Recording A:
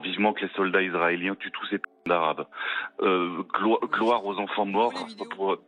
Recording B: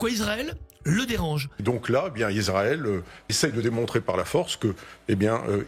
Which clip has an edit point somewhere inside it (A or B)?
B